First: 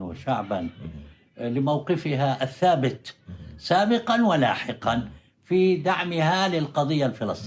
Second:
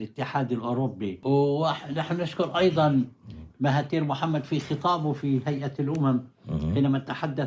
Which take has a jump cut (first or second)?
second